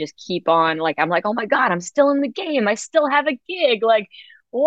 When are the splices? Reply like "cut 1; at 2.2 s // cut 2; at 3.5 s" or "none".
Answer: none